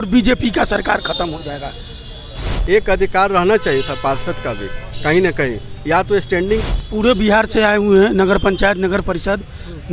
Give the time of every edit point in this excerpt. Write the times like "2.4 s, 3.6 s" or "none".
2.5 s, 6.6 s